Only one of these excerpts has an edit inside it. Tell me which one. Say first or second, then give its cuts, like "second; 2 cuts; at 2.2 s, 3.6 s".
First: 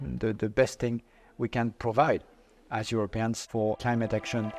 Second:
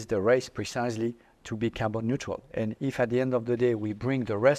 first; 1 cut; at 3.6 s